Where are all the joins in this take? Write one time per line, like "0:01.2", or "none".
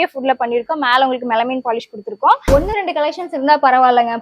0:02.5

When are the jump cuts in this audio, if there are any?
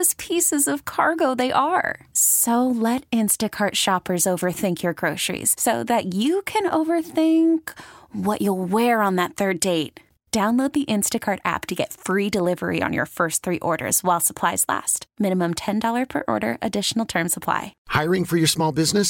0:17.8

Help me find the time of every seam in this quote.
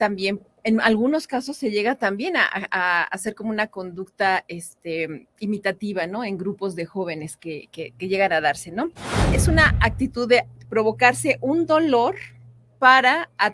0:09.3

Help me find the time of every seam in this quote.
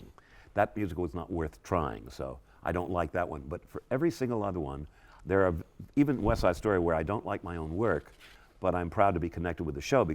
none

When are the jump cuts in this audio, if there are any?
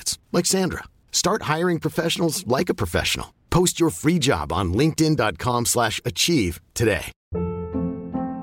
0:07.2

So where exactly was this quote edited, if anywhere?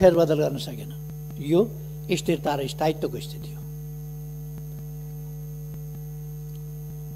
none

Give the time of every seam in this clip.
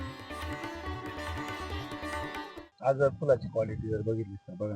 0:02.6

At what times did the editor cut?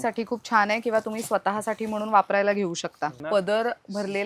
0:03.2

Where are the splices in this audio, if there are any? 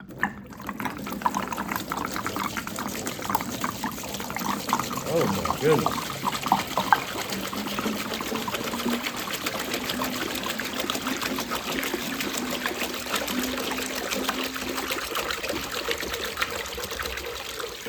none

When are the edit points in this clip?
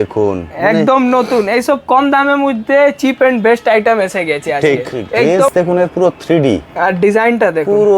0:05.4

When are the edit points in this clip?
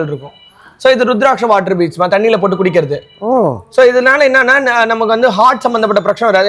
none

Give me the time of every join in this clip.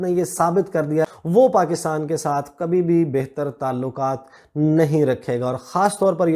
0:01.1

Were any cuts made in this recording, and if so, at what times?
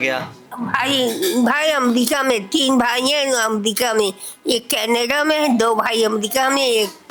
none

